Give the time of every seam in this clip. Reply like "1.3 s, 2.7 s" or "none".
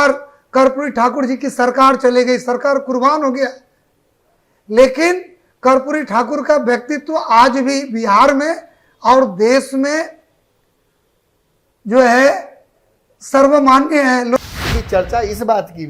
14.4 s

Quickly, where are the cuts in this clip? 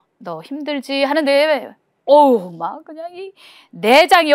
none

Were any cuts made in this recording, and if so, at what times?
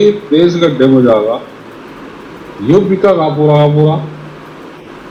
none

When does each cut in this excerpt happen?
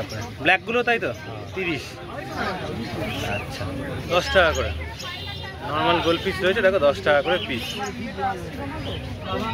none

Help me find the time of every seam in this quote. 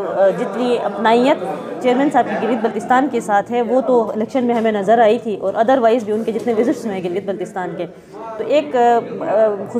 none

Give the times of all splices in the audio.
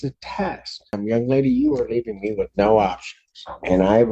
1.0 s

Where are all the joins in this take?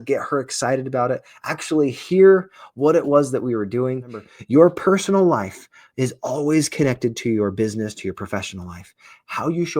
4.3 s

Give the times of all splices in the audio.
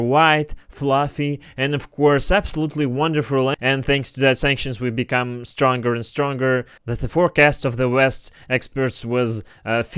3.6 s, 6.8 s

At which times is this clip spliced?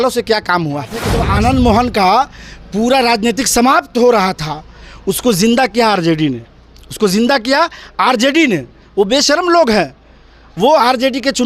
1.2 s

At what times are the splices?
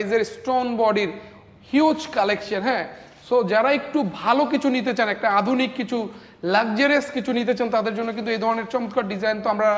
none

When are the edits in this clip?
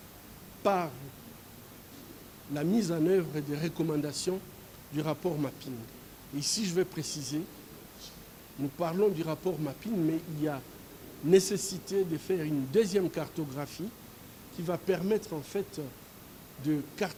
none

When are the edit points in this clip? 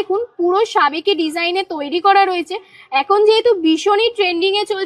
none

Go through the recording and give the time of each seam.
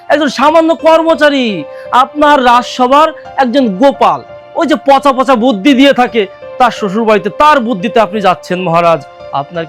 none

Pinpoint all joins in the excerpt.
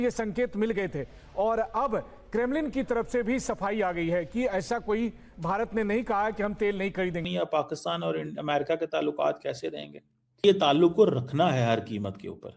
7.2 s

